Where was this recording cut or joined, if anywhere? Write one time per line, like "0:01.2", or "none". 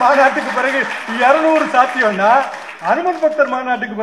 none